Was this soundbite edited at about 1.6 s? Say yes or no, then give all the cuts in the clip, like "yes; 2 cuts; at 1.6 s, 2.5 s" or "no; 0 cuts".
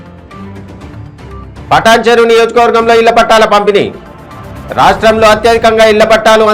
yes; 1 cut; at 1.6 s